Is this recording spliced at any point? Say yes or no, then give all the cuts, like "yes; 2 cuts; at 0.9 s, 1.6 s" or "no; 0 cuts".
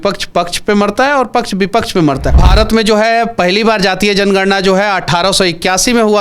yes; 1 cut; at 2.4 s